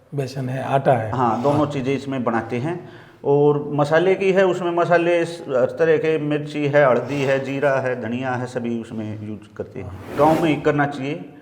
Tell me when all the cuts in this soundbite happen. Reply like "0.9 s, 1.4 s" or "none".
10.1 s